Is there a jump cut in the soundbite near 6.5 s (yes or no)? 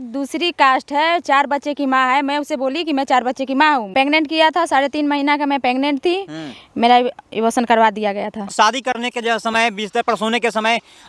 no